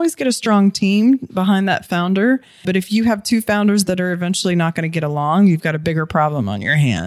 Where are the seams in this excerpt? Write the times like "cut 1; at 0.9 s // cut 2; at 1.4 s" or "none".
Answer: cut 1; at 2.5 s

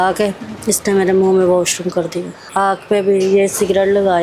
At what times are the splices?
cut 1; at 2.4 s

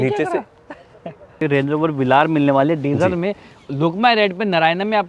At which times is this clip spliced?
cut 1; at 1.4 s

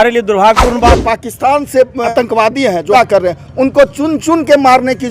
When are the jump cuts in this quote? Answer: cut 1; at 0.9 s // cut 2; at 2.1 s // cut 3; at 2.9 s

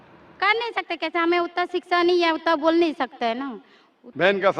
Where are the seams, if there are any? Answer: none

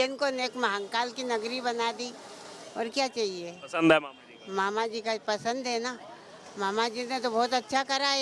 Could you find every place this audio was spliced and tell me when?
none

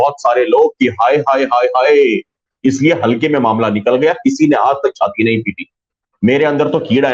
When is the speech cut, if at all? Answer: cut 1; at 2.4 s

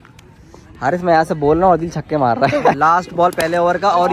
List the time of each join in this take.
cut 1; at 2.8 s

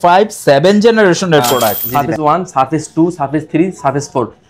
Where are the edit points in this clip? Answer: cut 1; at 1.7 s

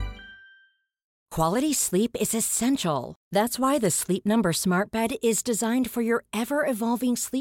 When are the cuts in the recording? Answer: cut 1; at 1.2 s

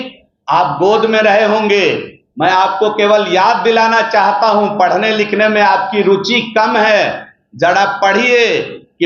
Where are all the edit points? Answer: none

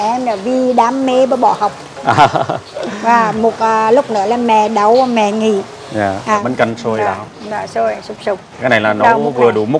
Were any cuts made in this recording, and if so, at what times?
cut 1; at 6.4 s

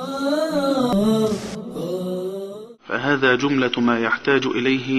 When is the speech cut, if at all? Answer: cut 1; at 0.9 s

